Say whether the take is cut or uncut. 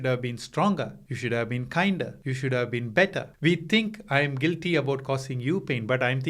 cut